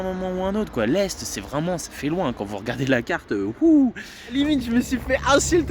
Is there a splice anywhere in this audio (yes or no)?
yes